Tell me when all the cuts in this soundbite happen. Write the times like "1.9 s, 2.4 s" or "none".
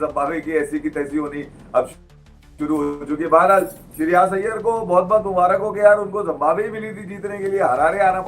none